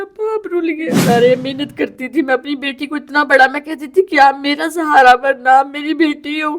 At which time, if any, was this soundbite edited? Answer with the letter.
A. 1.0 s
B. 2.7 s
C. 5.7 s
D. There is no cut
A